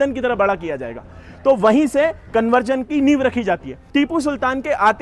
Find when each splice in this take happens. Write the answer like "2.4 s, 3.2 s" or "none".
3.7 s